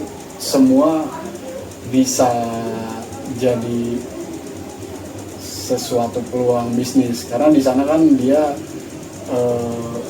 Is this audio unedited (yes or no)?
yes